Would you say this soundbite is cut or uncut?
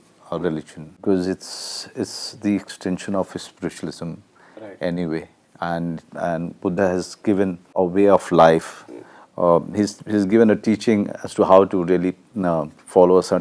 cut